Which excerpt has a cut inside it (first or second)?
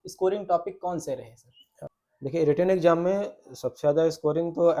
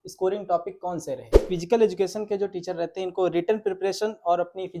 second